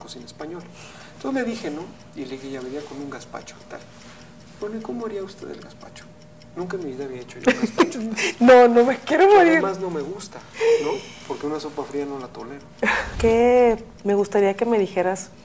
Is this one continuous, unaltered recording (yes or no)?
no